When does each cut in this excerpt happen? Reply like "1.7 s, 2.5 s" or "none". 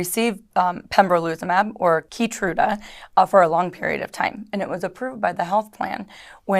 2.1 s